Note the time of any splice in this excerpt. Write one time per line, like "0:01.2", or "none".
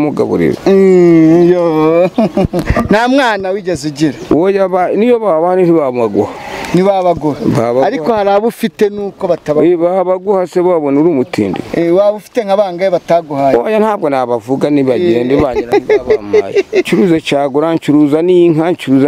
0:16.9